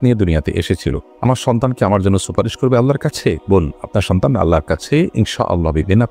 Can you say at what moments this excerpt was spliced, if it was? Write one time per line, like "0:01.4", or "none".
none